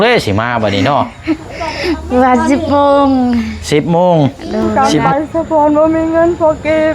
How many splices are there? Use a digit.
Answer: 1